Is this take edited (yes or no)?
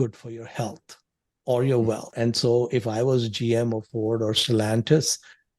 yes